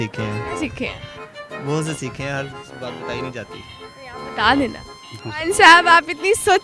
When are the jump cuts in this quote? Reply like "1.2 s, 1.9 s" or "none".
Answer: 5.0 s